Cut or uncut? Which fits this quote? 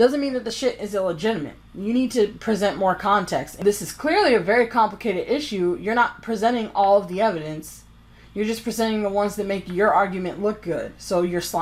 uncut